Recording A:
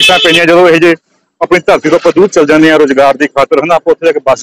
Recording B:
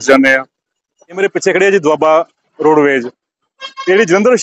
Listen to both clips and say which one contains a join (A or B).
B